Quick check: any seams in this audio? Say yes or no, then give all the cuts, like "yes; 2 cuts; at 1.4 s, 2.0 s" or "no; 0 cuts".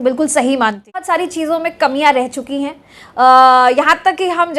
yes; 1 cut; at 1.1 s